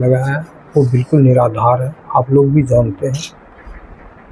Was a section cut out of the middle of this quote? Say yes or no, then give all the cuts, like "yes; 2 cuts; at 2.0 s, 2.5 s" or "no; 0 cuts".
no; 0 cuts